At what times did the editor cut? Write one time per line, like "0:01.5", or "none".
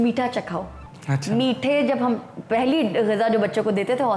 none